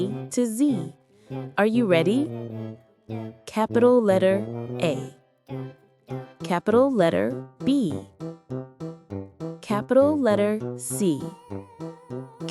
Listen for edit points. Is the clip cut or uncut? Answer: cut